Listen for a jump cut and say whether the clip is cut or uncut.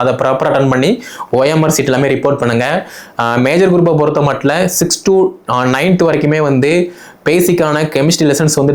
uncut